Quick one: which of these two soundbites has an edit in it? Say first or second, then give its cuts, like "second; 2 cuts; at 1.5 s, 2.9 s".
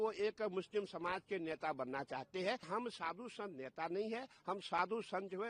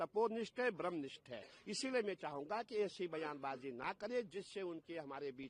first; 1 cut; at 2.6 s